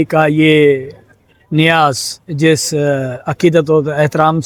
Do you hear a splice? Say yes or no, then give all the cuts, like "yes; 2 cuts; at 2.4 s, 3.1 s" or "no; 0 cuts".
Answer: no; 0 cuts